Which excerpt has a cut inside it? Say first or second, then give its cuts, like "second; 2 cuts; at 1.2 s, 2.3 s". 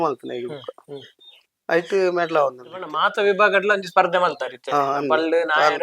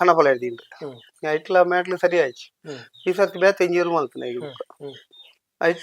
first; 1 cut; at 3.0 s